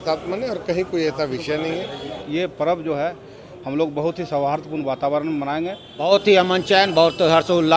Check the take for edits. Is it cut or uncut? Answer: cut